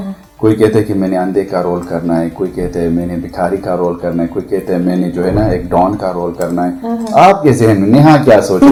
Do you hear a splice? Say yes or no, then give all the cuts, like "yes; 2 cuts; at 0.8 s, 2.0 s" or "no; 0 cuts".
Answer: no; 0 cuts